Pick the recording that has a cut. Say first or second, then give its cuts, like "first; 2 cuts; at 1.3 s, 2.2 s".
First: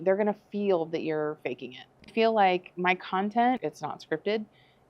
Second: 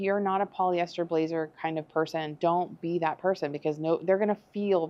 first; 2 cuts; at 2.1 s, 3.6 s